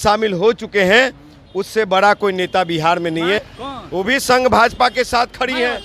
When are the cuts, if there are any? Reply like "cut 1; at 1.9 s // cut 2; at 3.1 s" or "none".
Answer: cut 1; at 3.5 s

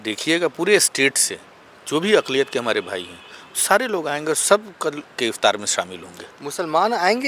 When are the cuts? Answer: none

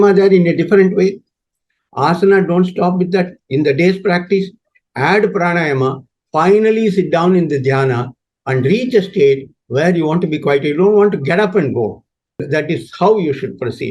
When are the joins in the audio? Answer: cut 1; at 12.4 s

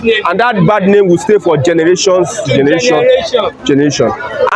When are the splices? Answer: none

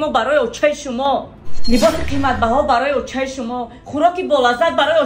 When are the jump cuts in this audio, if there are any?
none

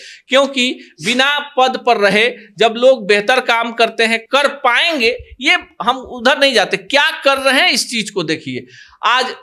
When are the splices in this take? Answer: none

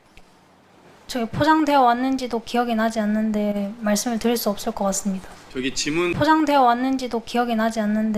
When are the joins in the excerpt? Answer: cut 1; at 6.1 s

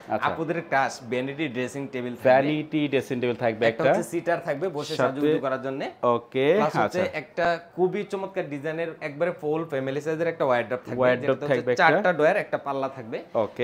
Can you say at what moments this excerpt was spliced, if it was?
none

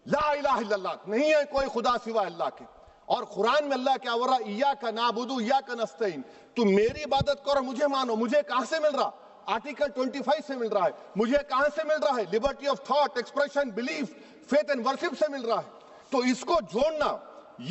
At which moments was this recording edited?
none

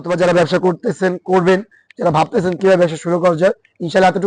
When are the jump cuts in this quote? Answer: none

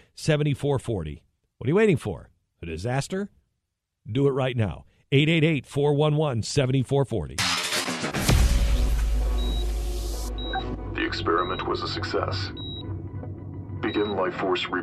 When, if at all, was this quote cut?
cut 1; at 7.3 s

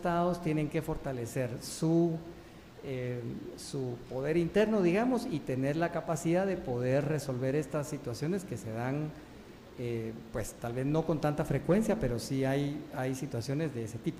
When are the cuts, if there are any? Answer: none

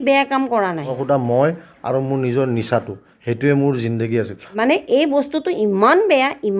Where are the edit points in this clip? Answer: cut 1; at 0.9 s // cut 2; at 4.6 s

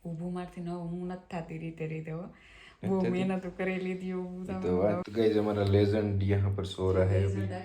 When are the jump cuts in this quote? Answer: cut 1; at 5.0 s

